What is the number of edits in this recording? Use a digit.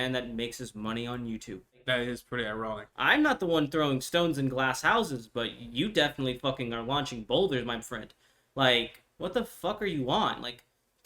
2